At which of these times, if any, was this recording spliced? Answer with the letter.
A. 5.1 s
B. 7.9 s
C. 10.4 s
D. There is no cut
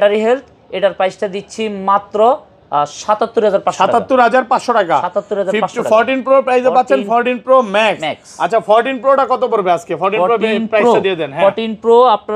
D